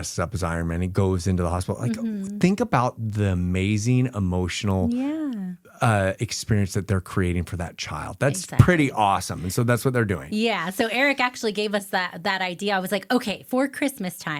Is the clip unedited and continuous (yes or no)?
yes